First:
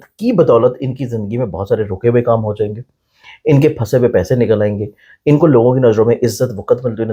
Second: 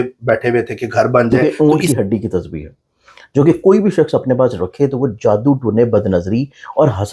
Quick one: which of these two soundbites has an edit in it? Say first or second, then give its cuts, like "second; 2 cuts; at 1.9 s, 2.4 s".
second; 1 cut; at 1.6 s